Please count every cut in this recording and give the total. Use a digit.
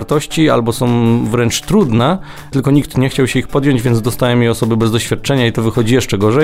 0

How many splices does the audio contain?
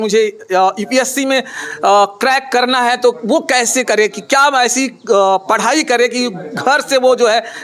0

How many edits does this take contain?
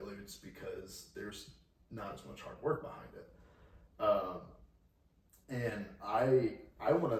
0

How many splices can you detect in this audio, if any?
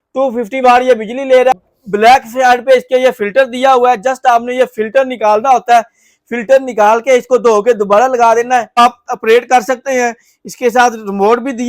2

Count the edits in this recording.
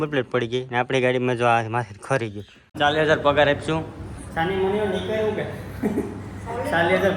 1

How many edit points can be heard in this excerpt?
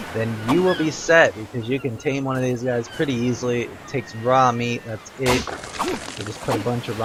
0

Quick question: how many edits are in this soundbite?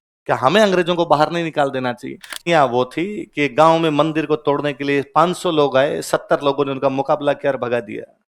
1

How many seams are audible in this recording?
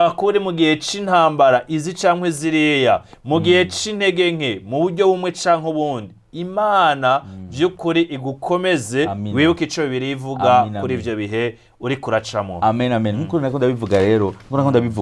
0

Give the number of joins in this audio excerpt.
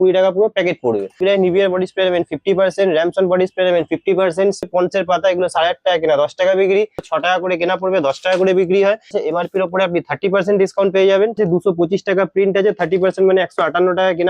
5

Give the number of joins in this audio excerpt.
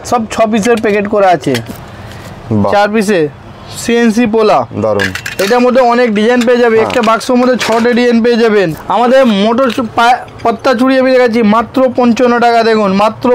2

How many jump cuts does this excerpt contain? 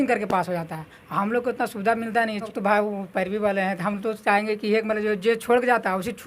1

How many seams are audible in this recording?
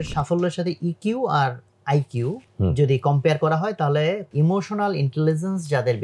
2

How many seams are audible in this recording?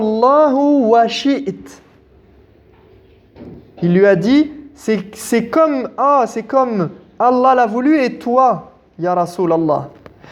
0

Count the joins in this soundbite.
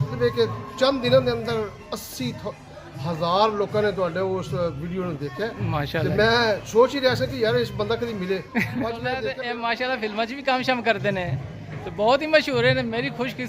1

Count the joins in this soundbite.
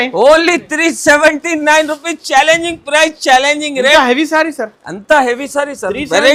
0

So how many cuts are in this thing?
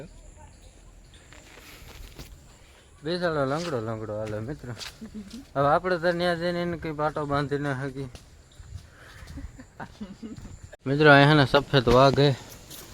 1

